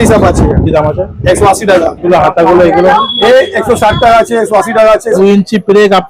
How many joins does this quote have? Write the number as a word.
two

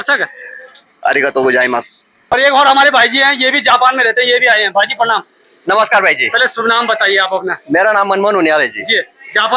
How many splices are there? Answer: one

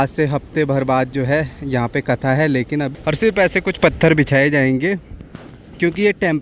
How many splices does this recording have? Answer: one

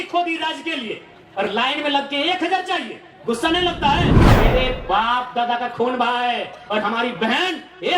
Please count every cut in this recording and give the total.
one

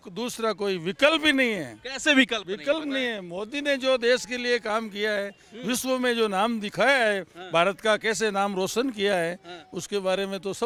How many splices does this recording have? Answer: zero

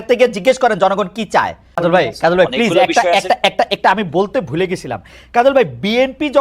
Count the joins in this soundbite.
one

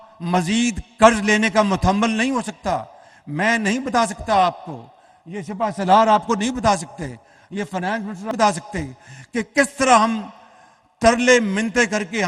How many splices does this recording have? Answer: zero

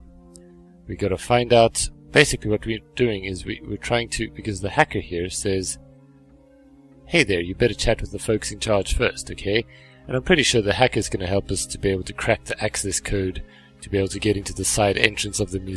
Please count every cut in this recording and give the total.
one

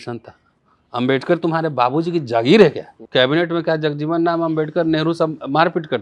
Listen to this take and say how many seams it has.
one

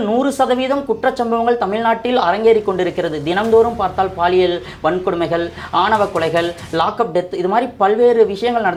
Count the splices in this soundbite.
zero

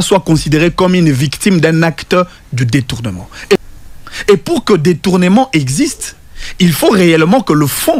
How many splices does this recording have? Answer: one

